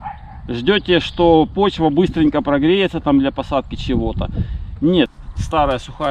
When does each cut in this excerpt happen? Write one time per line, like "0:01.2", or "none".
0:05.1